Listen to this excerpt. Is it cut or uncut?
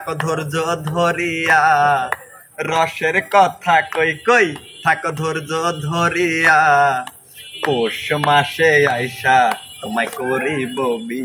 uncut